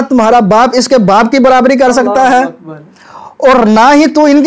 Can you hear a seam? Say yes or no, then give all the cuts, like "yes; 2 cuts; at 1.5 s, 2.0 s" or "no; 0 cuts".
no; 0 cuts